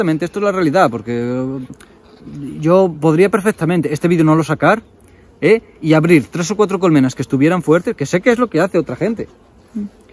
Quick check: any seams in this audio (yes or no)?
no